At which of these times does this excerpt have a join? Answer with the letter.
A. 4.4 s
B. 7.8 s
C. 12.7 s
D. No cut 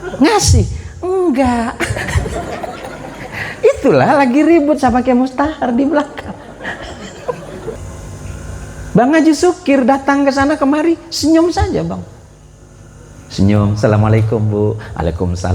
B